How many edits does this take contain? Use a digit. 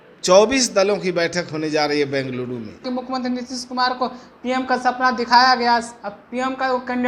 1